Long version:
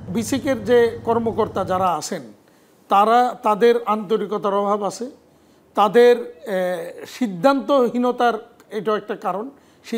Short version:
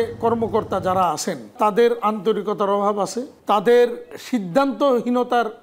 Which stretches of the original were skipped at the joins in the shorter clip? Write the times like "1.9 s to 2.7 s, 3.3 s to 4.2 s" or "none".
2.4 s to 3.4 s, 5.1 s to 5.6 s, 6.4 s to 7.0 s